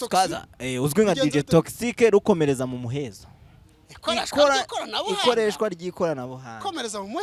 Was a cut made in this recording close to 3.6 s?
no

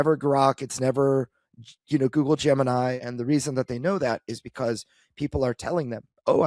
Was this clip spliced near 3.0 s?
yes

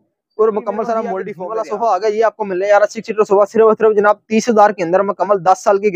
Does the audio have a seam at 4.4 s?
no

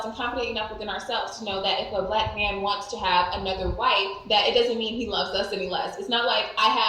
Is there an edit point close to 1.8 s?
yes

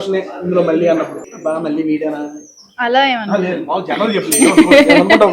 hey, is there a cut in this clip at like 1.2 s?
yes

